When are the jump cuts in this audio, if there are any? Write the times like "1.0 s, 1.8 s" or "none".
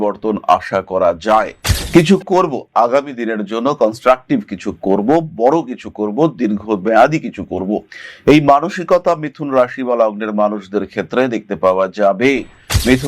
1.6 s